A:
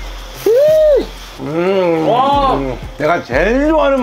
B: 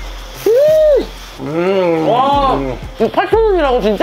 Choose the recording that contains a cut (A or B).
A